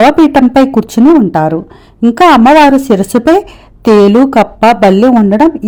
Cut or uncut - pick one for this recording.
uncut